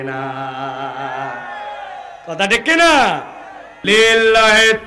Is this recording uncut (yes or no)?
no